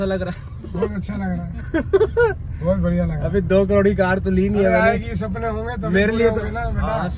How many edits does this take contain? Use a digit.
0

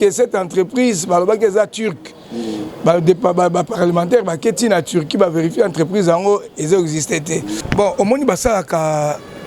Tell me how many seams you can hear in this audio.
1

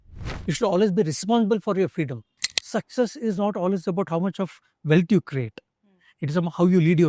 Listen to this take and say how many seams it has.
1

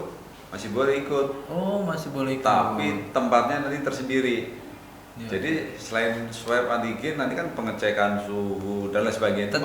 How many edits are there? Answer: 0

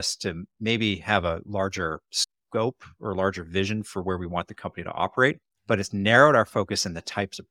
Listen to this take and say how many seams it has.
1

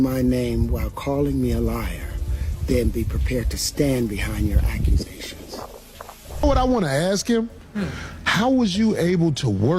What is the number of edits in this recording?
1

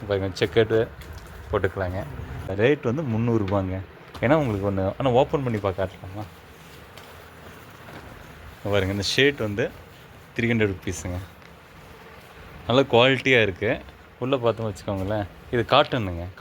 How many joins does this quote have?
1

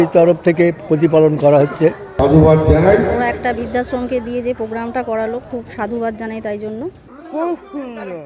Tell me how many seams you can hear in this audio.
2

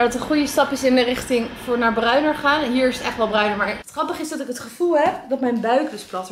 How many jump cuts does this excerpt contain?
1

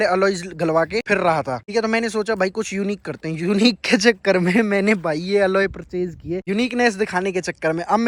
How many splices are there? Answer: 0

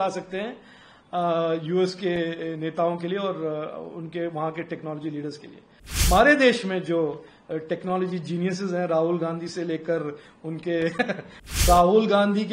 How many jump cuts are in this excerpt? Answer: 2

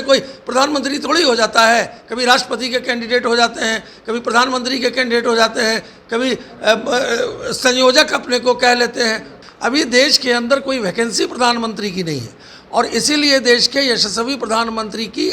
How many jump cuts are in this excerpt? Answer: 1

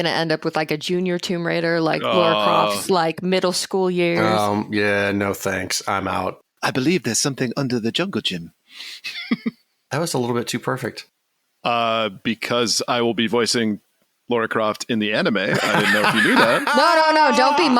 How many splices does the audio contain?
1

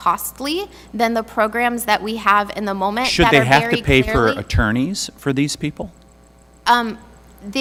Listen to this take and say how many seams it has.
0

